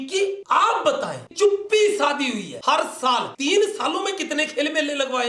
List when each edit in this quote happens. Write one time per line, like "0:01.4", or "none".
0:01.3
0:02.5